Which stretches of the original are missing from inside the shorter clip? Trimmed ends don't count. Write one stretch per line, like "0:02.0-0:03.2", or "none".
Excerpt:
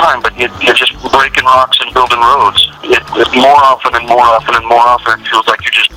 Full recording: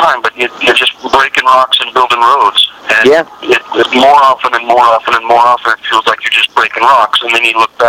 0:02.8-0:03.3